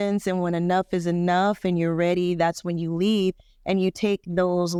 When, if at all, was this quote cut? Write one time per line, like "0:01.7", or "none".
none